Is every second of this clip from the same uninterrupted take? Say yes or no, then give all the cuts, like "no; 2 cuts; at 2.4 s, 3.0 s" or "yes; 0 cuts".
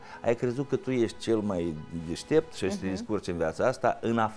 yes; 0 cuts